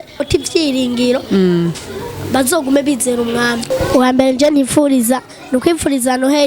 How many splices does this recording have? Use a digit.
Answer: 1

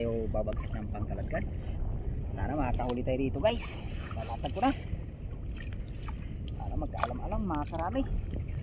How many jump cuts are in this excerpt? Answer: 0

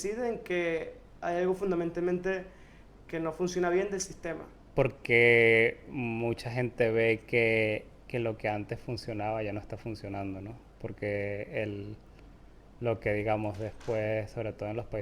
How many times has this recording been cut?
1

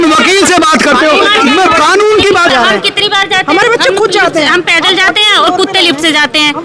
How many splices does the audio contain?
1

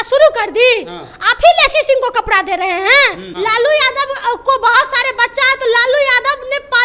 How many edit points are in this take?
1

